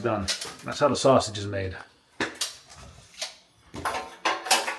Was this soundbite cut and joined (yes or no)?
no